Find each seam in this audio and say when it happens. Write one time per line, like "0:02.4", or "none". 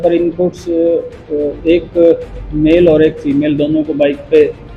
none